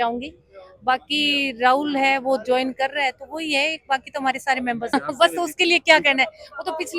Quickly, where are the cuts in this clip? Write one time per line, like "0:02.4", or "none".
0:04.8